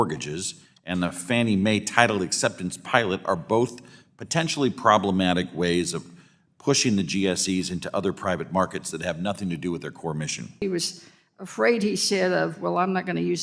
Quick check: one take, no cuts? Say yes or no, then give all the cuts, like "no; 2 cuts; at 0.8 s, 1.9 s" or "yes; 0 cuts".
no; 1 cut; at 10.6 s